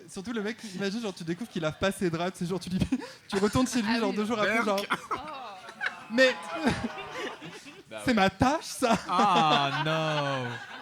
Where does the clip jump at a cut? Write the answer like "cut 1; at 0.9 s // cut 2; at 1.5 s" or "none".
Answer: none